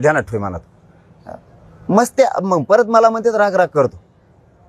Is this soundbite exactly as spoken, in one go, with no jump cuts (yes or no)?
yes